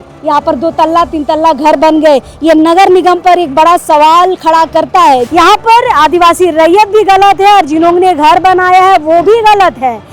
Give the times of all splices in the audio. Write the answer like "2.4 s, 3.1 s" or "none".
5.3 s